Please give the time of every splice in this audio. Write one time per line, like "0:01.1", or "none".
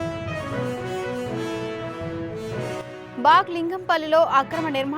0:02.8